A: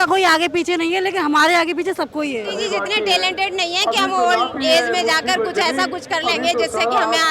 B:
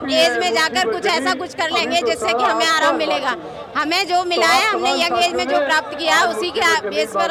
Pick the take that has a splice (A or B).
A